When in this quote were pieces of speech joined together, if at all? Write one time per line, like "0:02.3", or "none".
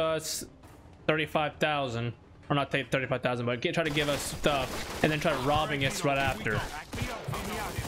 none